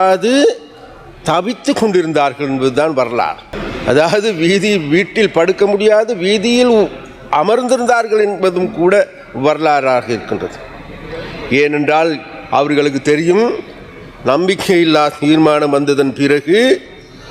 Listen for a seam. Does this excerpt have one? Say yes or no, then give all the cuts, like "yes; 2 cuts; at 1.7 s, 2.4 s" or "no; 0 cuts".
no; 0 cuts